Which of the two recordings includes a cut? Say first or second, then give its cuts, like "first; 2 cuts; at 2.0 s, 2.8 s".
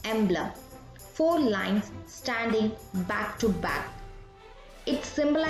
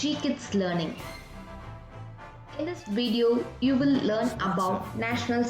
second; 2 cuts; at 1.0 s, 2.6 s